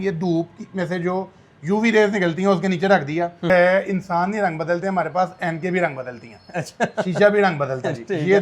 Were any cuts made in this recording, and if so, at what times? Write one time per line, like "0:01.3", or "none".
0:03.5